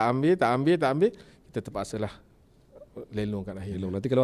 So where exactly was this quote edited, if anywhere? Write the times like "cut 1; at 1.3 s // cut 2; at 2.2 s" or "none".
none

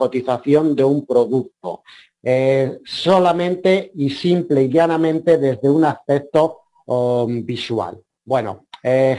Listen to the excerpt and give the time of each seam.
cut 1; at 6.2 s

